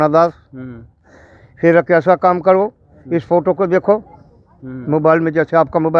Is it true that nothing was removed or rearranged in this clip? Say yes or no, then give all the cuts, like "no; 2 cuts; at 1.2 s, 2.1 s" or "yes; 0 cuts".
yes; 0 cuts